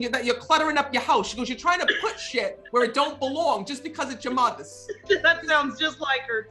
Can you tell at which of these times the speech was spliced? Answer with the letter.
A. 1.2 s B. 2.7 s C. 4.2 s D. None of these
D